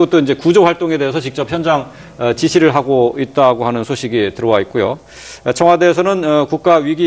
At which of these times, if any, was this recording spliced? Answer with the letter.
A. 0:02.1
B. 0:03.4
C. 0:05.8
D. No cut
D